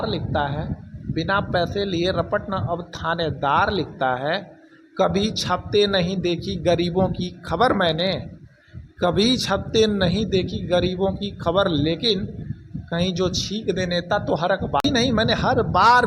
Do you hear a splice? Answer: yes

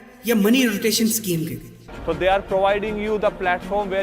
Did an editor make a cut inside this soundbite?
yes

